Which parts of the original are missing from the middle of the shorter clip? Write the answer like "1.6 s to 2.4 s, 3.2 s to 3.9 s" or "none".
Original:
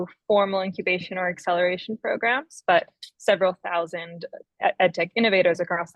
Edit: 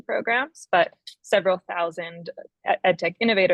none